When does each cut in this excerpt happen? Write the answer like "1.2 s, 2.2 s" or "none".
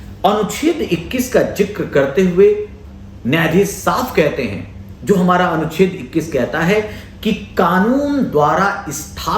none